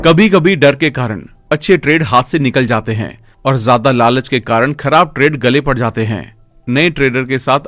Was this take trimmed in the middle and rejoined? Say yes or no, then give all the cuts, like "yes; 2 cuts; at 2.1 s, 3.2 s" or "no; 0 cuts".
no; 0 cuts